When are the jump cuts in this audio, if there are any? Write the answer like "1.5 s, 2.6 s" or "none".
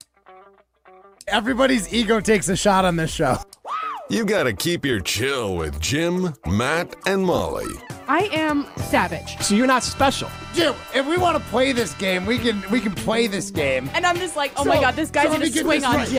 none